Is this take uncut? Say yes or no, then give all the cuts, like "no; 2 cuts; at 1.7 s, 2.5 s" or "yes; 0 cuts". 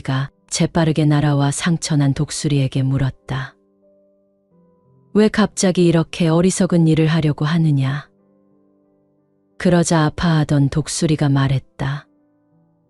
no; 2 cuts; at 3.5 s, 5.1 s